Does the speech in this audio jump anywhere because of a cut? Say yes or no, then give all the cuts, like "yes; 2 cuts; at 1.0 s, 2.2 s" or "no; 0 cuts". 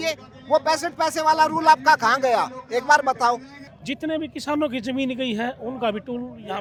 no; 0 cuts